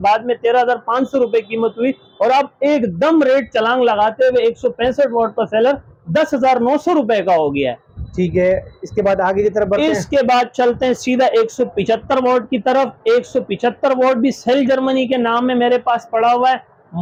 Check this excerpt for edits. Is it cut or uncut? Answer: uncut